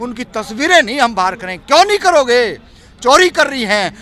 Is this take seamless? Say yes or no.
yes